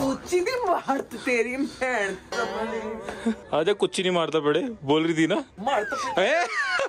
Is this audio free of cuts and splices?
no; 2 cuts; at 3.4 s, 5.5 s

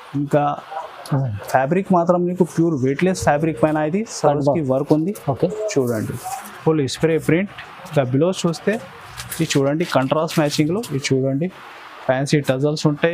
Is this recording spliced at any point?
yes; 1 cut; at 10.9 s

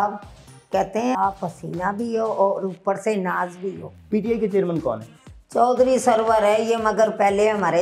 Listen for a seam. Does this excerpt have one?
yes; 2 cuts; at 1.2 s, 4.0 s

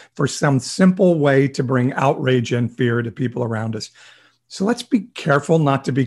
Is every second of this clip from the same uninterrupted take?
yes; 0 cuts

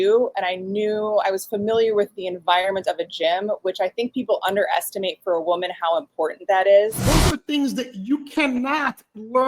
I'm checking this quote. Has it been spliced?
yes; 1 cut; at 7.0 s

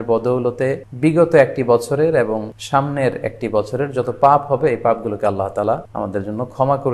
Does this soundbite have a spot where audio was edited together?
yes; 3 cuts; at 0.9 s, 2.5 s, 5.9 s

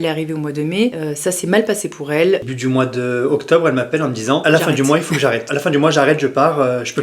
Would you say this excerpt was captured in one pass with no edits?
no; 4 cuts; at 1.0 s, 2.5 s, 4.4 s, 5.5 s

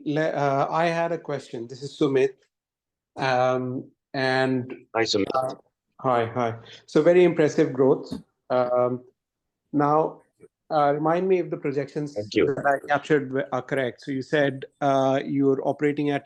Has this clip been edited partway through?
no; 0 cuts

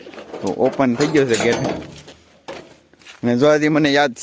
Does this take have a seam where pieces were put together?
no; 0 cuts

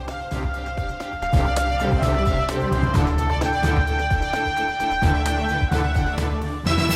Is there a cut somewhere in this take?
yes; 1 cut; at 1.2 s

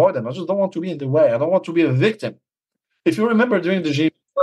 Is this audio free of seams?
yes; 0 cuts

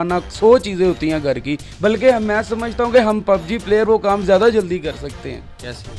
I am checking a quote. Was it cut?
no; 0 cuts

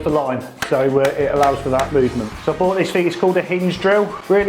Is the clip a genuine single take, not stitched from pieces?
no; 1 cut; at 2.3 s

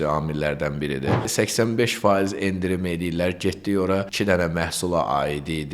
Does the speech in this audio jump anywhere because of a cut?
yes; 2 cuts; at 1.3 s, 4.1 s

